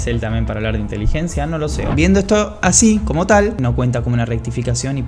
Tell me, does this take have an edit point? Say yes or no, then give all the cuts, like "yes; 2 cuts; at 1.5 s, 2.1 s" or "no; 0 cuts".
yes; 1 cut; at 1.8 s